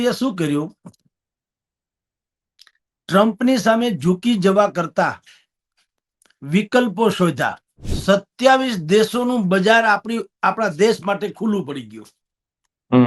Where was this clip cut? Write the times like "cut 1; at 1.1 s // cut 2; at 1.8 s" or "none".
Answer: cut 1; at 7.9 s